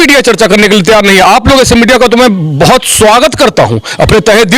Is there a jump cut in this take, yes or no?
no